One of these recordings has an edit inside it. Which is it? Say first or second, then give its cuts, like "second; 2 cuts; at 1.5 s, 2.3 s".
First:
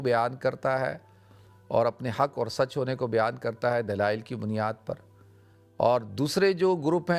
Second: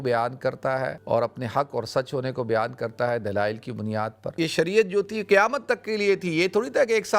second; 2 cuts; at 1.0 s, 4.3 s